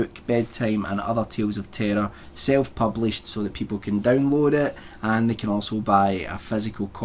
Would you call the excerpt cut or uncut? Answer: uncut